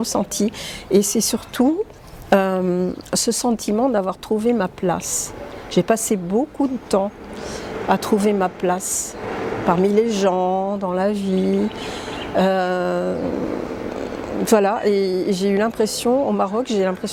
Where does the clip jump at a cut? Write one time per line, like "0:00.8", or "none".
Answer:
none

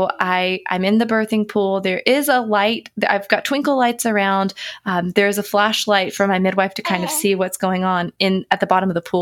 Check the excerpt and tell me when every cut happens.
none

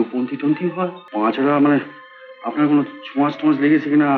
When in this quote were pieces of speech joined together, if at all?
0:01.0

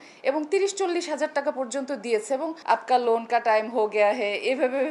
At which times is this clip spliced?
0:02.5

